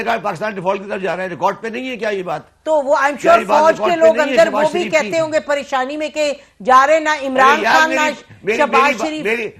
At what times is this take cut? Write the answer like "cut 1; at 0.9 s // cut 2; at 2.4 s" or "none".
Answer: none